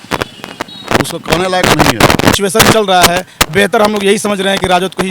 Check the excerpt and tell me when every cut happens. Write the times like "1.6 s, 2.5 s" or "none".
2.3 s